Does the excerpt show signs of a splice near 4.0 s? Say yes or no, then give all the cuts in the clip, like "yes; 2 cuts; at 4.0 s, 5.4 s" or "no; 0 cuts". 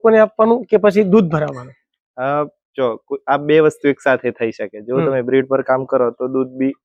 no; 0 cuts